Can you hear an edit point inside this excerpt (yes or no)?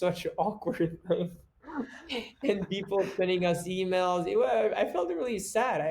no